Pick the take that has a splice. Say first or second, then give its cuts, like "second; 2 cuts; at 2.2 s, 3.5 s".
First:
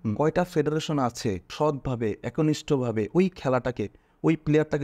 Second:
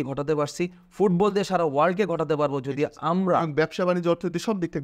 first; 1 cut; at 1.5 s